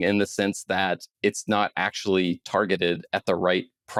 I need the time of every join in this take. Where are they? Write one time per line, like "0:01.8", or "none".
none